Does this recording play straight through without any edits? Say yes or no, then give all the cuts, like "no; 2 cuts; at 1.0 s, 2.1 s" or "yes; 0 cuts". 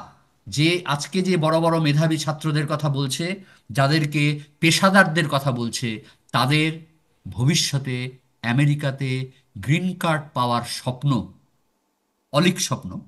yes; 0 cuts